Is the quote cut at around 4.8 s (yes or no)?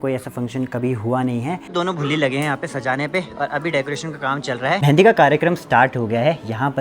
yes